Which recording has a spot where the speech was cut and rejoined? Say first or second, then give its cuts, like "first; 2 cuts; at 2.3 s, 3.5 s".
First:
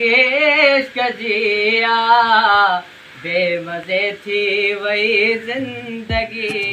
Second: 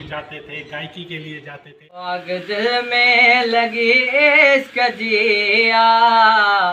second; 1 cut; at 2.2 s